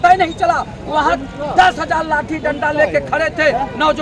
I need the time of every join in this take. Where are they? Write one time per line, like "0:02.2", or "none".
none